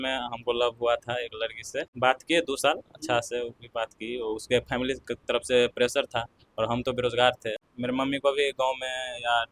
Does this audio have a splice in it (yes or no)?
yes